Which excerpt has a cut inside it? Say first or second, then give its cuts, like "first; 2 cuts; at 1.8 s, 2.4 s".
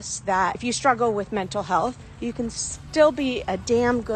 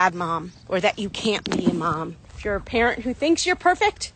second; 1 cut; at 2.1 s